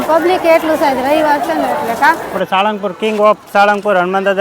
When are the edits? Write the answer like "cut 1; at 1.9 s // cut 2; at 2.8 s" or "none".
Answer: cut 1; at 2.4 s